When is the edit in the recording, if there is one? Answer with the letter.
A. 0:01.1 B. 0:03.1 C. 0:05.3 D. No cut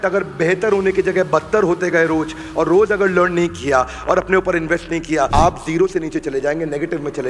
C